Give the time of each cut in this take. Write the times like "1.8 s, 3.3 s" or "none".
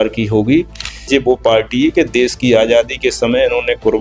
1.1 s